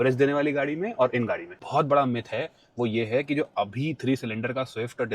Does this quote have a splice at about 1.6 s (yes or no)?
yes